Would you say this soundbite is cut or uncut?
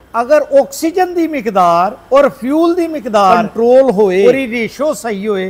cut